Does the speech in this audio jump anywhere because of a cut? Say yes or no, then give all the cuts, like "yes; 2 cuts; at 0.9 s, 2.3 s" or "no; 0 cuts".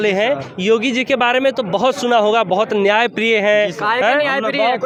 no; 0 cuts